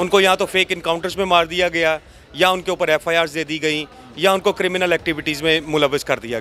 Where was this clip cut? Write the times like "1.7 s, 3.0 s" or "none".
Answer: none